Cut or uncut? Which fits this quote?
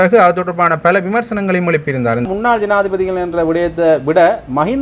cut